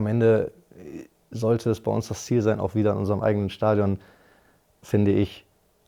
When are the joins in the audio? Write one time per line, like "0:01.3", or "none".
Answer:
none